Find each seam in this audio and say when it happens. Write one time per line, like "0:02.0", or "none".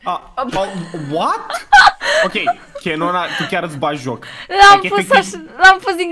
none